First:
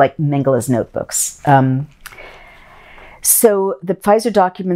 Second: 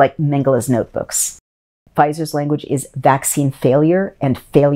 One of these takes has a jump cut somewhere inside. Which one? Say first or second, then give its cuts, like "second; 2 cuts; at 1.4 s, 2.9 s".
second; 1 cut; at 1.4 s